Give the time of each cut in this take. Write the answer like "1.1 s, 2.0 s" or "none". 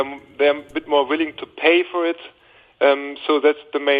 1.3 s